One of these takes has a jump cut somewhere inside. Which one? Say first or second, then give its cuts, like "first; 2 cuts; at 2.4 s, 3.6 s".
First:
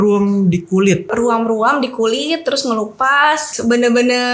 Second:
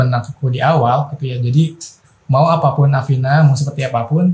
first; 2 cuts; at 1.1 s, 3.5 s